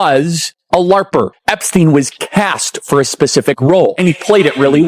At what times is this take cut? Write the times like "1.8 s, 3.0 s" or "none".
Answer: 1.4 s, 4.0 s